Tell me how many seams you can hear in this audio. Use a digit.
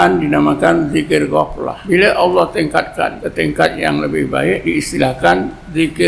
3